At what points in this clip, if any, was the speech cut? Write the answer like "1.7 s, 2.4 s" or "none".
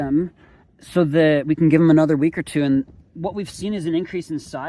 none